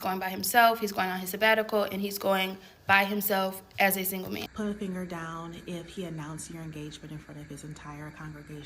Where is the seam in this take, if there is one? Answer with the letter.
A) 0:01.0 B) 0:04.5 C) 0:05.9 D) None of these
B